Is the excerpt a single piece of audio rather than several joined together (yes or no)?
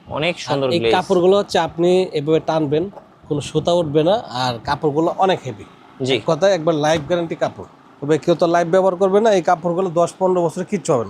yes